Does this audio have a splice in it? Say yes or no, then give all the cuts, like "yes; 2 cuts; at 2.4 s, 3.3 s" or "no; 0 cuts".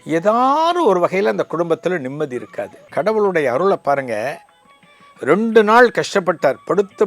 yes; 1 cut; at 2.9 s